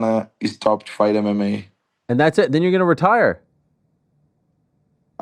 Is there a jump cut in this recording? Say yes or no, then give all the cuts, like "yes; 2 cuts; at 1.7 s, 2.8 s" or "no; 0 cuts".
no; 0 cuts